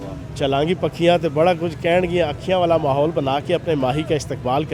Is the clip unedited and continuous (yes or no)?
yes